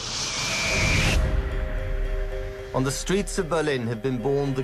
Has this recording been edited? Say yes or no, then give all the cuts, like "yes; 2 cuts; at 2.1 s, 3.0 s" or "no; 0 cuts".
no; 0 cuts